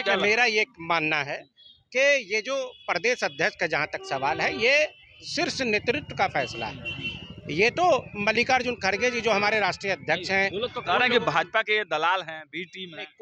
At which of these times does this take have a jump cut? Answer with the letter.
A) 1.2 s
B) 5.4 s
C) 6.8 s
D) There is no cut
D